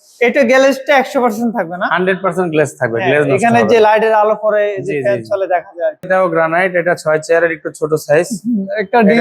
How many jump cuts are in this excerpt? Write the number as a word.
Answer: one